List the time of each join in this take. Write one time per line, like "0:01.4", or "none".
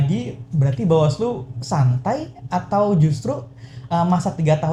none

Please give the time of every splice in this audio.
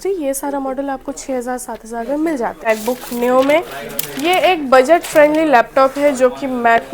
0:02.6

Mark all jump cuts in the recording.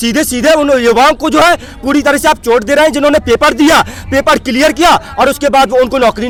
none

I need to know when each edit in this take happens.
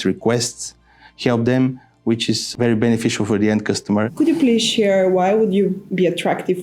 0:02.5
0:04.1

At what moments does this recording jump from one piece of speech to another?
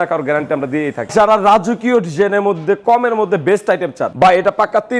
0:01.1
0:04.0

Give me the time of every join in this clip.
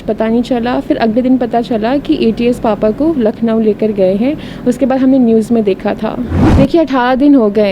0:06.4

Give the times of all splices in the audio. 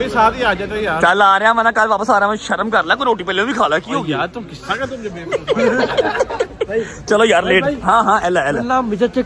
none

